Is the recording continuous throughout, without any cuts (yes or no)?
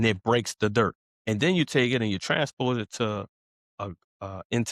no